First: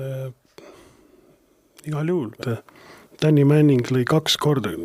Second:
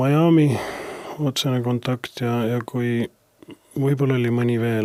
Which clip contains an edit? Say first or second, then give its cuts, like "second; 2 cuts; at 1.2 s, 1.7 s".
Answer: first; 1 cut; at 2.4 s